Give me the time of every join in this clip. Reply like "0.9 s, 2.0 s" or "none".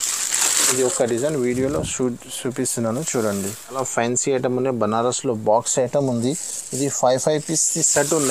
3.8 s